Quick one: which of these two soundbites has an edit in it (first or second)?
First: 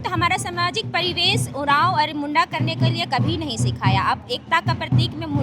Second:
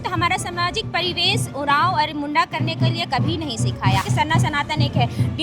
second